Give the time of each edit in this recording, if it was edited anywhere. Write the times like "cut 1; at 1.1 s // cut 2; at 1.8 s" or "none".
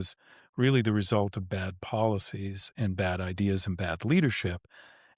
none